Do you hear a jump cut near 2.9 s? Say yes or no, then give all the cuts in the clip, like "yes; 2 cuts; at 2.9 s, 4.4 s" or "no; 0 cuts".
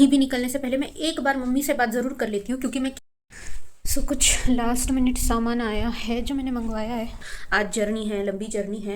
yes; 2 cuts; at 2.9 s, 7.3 s